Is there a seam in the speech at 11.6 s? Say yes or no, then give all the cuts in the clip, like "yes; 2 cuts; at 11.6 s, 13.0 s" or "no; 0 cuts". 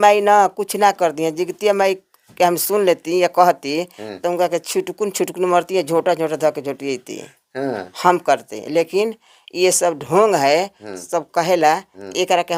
no; 0 cuts